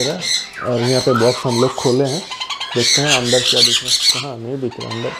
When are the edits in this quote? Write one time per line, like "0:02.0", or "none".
none